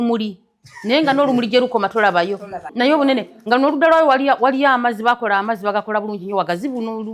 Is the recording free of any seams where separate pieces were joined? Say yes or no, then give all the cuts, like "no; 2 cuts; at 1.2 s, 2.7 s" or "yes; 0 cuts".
no; 1 cut; at 2.6 s